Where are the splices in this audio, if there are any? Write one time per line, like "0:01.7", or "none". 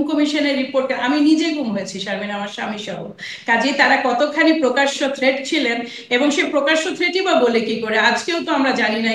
none